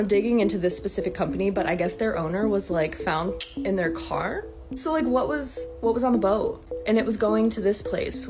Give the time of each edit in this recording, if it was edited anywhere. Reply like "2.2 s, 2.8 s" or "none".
none

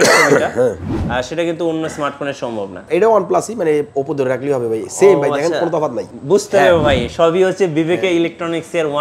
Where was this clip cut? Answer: 2.8 s, 6.1 s

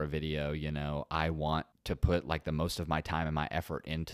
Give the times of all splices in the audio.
1.7 s

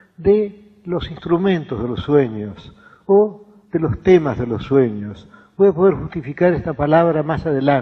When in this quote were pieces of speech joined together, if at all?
none

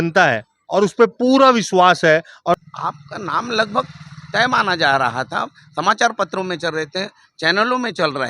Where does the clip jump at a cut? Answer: 2.6 s

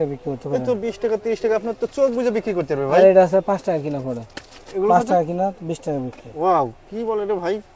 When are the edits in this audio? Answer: none

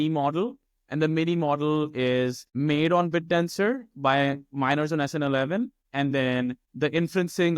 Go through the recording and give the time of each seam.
2.4 s, 5.8 s, 6.6 s

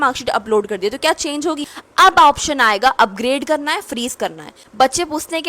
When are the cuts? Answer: 1.7 s, 4.6 s

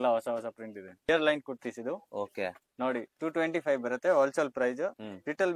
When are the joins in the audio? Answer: 1.1 s

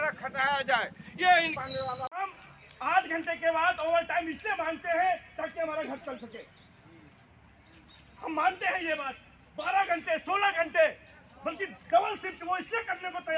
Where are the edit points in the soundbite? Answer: 1.7 s

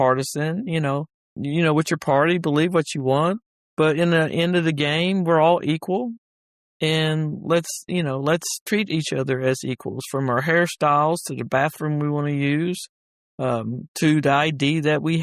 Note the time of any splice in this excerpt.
1.2 s

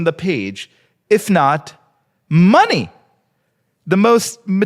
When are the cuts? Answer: none

